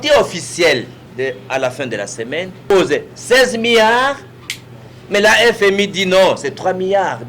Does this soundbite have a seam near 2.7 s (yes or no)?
yes